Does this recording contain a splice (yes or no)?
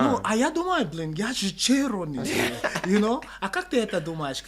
no